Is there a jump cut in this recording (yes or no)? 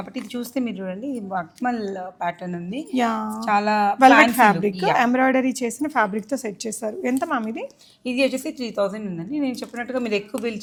no